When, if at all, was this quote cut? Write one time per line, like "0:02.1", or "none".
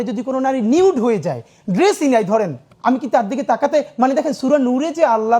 0:02.6